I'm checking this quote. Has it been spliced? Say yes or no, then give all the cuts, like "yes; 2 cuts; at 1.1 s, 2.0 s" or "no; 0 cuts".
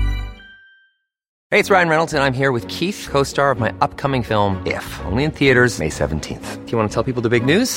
yes; 1 cut; at 1.4 s